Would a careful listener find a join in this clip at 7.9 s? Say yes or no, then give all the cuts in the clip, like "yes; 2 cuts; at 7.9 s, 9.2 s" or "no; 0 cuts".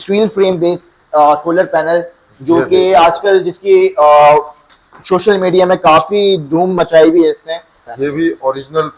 yes; 1 cut; at 7.9 s